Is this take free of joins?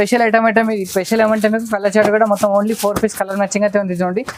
yes; 0 cuts

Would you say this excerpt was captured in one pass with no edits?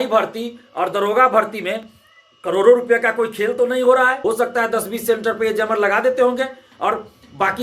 no; 1 cut; at 4.2 s

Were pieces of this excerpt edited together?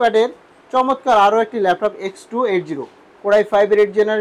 no; 0 cuts

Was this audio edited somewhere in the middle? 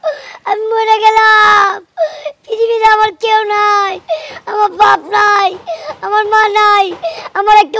no; 0 cuts

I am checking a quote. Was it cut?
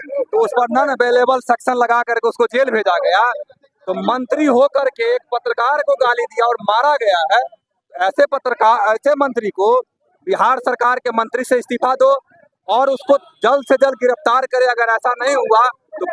no; 0 cuts

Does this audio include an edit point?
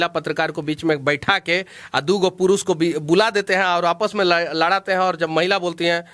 no; 0 cuts

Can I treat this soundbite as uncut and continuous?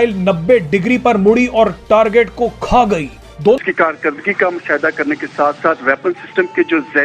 no; 1 cut; at 3.6 s

